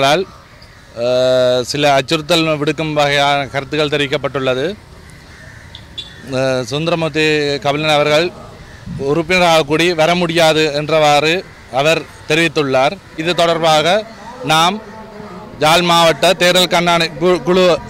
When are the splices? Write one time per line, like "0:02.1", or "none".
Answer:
0:13.2